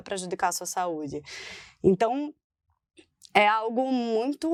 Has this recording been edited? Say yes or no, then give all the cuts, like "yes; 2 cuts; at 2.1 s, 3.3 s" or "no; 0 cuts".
no; 0 cuts